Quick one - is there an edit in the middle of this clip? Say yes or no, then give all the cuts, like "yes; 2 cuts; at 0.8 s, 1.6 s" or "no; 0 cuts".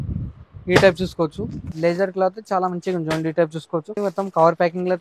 yes; 2 cuts; at 1.7 s, 4.0 s